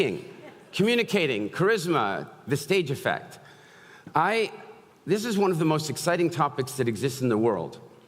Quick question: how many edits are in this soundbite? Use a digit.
0